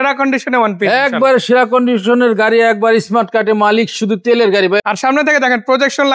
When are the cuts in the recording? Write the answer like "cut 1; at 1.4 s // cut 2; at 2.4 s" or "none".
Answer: cut 1; at 4.8 s